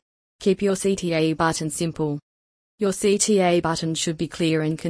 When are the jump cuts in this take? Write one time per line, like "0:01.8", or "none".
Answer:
0:00.8
0:02.0